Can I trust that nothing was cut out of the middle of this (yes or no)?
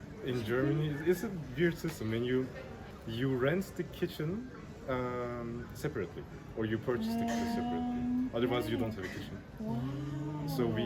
no